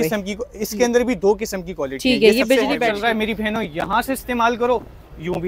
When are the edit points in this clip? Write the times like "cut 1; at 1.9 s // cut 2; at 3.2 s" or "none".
cut 1; at 2.9 s

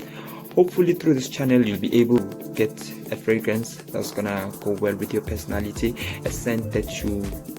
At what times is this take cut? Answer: cut 1; at 2.2 s

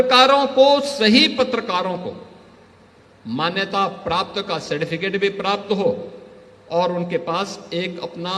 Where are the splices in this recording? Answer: none

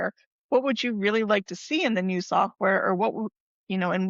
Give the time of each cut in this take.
none

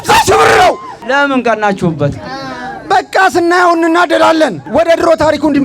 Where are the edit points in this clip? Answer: cut 1; at 0.9 s // cut 2; at 4.6 s

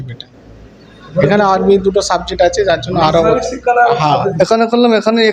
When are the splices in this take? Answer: cut 1; at 4.3 s

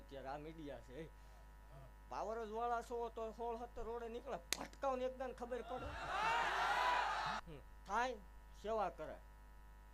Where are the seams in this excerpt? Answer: cut 1; at 7.4 s

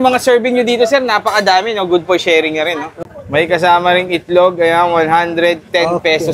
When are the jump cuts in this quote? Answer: cut 1; at 2.9 s

